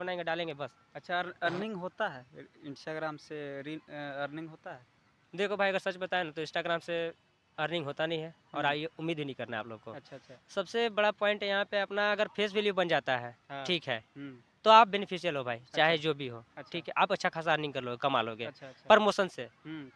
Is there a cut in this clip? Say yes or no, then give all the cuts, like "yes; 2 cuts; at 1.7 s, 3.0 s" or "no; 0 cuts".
no; 0 cuts